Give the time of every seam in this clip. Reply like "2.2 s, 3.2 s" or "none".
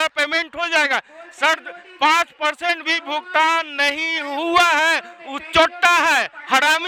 none